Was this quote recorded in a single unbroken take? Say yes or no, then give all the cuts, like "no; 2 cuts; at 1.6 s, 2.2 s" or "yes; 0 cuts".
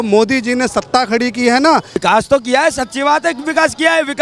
no; 1 cut; at 2.0 s